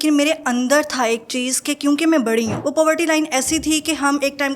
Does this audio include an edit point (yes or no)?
yes